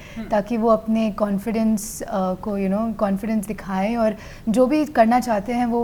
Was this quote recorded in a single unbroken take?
yes; 0 cuts

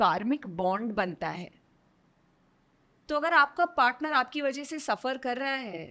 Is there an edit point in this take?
no; 0 cuts

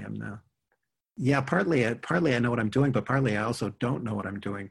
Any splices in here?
yes; 1 cut; at 1.1 s

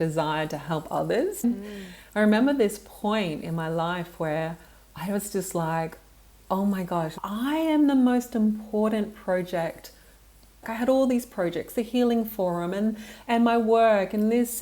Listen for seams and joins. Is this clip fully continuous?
no; 3 cuts; at 1.4 s, 7.2 s, 10.6 s

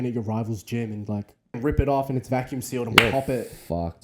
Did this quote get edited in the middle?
yes; 1 cut; at 1.6 s

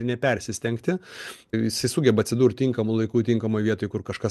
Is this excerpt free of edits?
no; 1 cut; at 1.5 s

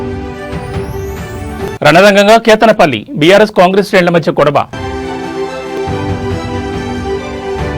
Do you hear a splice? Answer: no; 0 cuts

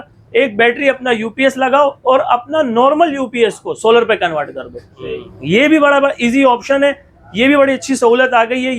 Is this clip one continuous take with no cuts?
yes; 0 cuts

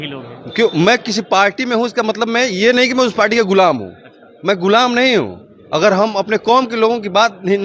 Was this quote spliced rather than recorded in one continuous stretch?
no; 0 cuts

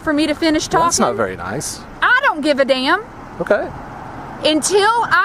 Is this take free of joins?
yes; 0 cuts

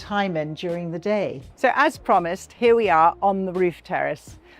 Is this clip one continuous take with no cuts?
no; 1 cut; at 1.4 s

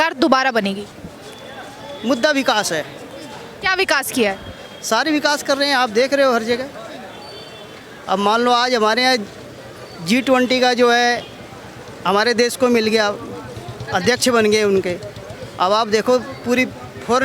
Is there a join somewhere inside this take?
no; 0 cuts

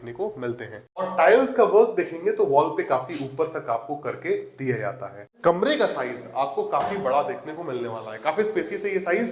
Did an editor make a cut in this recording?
yes; 2 cuts; at 1.1 s, 5.3 s

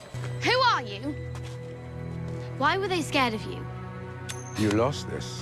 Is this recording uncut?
yes; 0 cuts

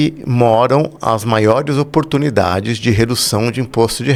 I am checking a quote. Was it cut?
no; 0 cuts

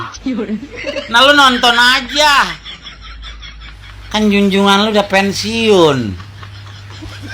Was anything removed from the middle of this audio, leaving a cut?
no; 0 cuts

